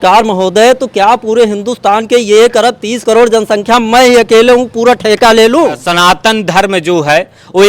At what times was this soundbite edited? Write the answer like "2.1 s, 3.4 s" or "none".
5.9 s